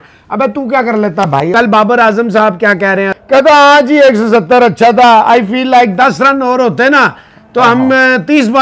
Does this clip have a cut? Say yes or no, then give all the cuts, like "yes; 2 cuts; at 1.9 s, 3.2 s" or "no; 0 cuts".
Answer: yes; 2 cuts; at 1.5 s, 3.1 s